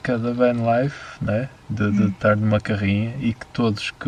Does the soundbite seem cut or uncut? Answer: uncut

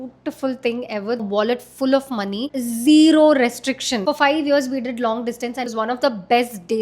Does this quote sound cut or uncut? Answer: cut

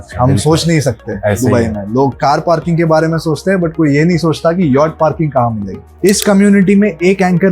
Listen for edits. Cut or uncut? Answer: cut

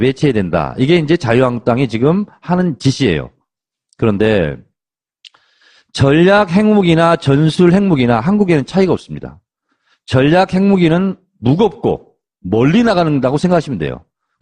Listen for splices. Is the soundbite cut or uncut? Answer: uncut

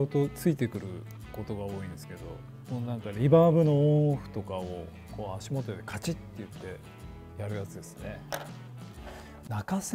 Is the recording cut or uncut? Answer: uncut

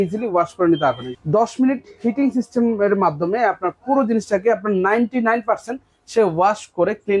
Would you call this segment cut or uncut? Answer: cut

